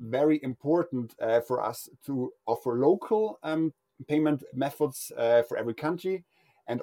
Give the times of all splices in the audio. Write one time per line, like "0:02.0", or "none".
none